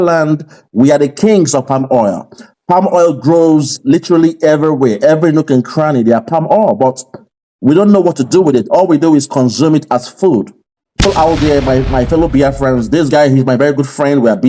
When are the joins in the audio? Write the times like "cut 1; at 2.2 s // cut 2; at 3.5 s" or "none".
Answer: cut 1; at 11.0 s